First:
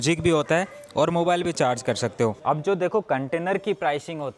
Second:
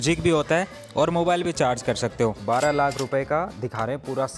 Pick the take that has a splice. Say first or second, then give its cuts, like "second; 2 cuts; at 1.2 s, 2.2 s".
second; 1 cut; at 2.4 s